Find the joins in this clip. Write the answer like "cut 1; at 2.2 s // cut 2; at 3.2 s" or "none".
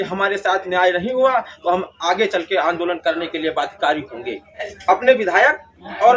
cut 1; at 4.7 s